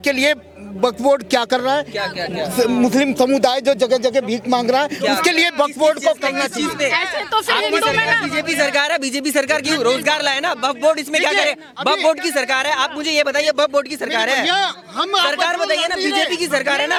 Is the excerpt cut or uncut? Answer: uncut